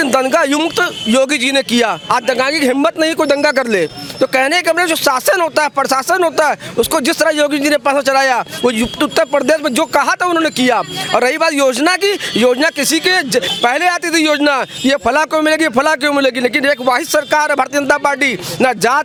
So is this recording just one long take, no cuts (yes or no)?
yes